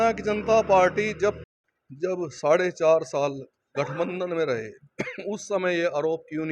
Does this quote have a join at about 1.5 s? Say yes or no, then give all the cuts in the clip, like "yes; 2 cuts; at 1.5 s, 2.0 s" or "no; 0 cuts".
yes; 1 cut; at 1.5 s